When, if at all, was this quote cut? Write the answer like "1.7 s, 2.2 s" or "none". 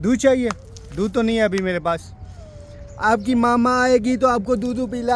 none